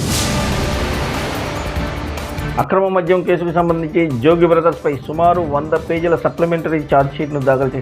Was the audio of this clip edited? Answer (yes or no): yes